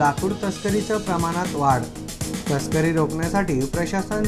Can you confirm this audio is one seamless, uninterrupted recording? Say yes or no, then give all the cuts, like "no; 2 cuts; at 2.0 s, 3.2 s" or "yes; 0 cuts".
yes; 0 cuts